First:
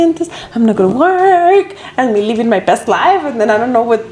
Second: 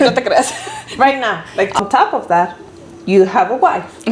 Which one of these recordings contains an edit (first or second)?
second